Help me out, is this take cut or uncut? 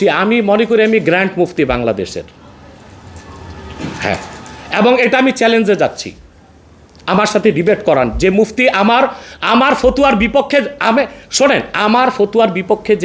uncut